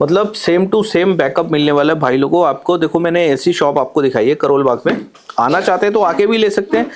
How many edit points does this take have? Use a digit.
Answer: 0